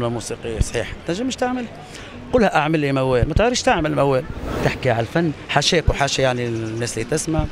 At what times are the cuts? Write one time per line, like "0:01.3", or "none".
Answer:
0:04.6